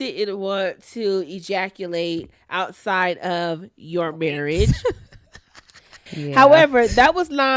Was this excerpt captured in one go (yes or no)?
no